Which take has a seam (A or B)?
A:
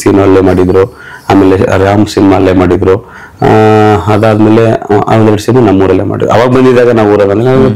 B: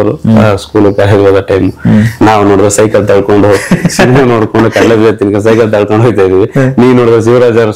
B